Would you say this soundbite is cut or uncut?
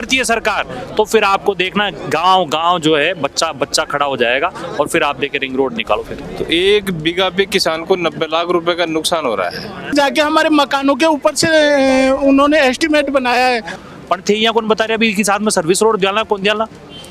cut